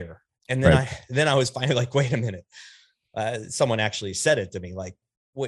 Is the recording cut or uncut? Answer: uncut